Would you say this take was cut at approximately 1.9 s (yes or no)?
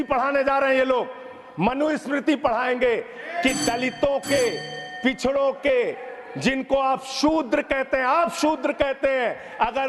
no